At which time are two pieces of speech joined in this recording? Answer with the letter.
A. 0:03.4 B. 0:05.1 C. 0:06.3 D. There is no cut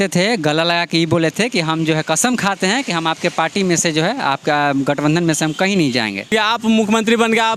C